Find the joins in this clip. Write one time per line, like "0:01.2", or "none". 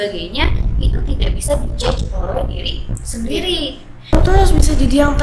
0:04.1